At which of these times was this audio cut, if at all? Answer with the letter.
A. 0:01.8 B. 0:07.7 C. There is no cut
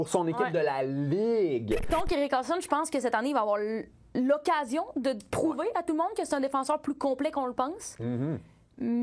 A